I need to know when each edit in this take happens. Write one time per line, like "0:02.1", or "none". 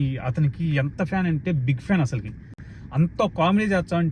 none